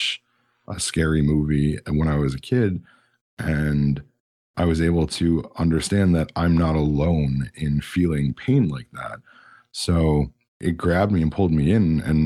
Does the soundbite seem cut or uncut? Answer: cut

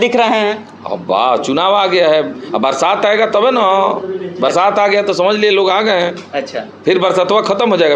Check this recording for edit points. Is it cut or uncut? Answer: uncut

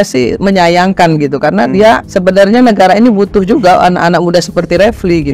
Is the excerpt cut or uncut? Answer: cut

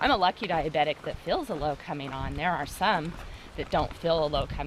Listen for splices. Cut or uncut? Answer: uncut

